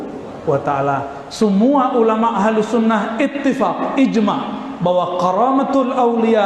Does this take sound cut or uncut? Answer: uncut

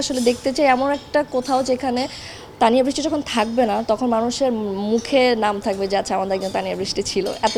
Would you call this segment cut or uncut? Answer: uncut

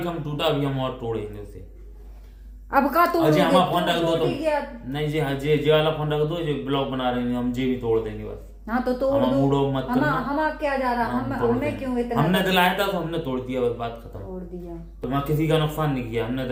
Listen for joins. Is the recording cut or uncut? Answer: uncut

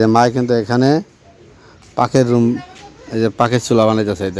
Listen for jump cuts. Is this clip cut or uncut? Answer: uncut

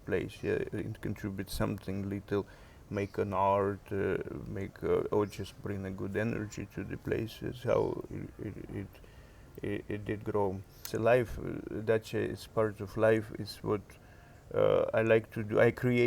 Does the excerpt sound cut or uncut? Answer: cut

